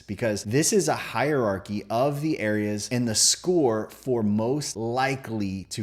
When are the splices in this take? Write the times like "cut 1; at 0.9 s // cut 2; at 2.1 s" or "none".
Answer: none